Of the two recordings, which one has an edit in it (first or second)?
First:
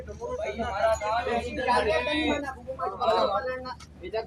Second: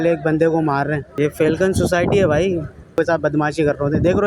second